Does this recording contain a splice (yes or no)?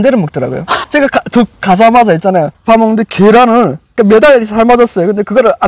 yes